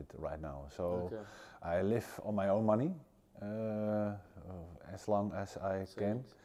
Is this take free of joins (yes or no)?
yes